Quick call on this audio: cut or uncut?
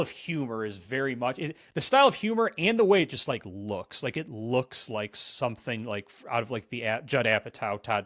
uncut